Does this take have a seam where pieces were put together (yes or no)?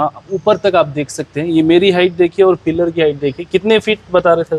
no